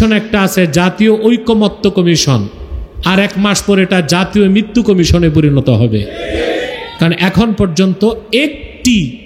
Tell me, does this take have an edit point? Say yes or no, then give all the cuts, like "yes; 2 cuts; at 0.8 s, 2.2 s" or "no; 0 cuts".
no; 0 cuts